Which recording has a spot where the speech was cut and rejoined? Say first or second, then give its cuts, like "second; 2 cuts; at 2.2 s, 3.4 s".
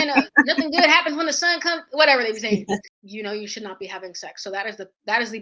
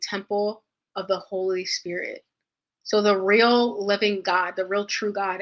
first; 1 cut; at 2.9 s